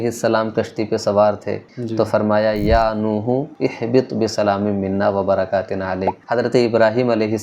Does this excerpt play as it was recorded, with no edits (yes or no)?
no